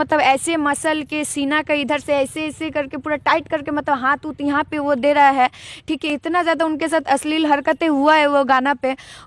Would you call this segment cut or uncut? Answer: uncut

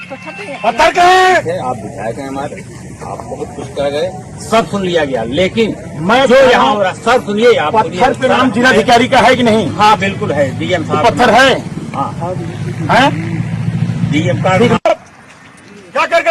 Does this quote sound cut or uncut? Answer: cut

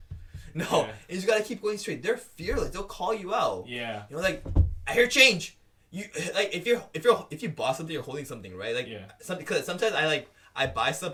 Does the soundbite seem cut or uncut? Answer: uncut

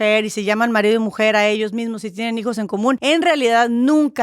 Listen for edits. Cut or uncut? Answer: cut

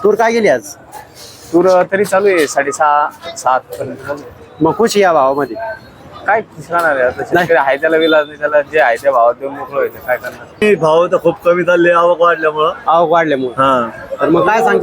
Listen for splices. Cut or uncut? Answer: cut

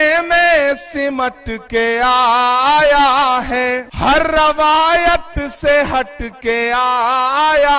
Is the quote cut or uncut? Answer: cut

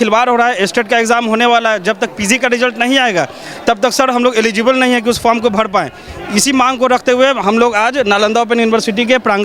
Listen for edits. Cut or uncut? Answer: uncut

